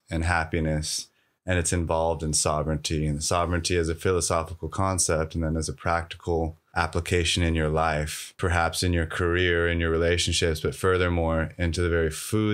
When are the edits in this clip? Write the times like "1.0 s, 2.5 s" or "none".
6.6 s, 8.4 s